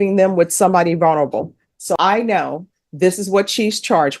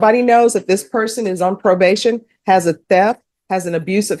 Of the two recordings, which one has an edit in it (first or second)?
first